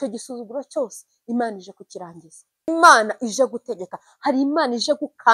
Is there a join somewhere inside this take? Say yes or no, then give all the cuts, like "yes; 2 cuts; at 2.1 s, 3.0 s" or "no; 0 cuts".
yes; 1 cut; at 2.7 s